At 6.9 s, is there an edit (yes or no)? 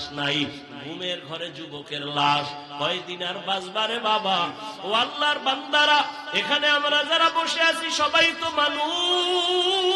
no